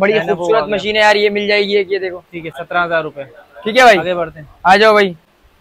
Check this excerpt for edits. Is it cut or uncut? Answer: uncut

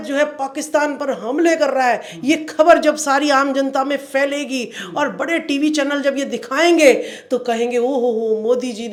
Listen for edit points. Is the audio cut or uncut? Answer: uncut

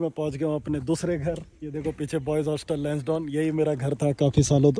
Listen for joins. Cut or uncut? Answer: uncut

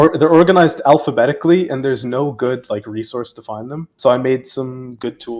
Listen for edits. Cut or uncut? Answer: uncut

